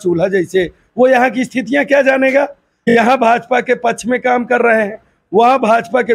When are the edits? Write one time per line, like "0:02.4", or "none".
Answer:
0:02.7